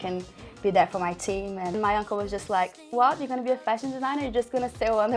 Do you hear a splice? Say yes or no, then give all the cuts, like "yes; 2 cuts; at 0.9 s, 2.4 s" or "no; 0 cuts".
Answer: yes; 1 cut; at 1.8 s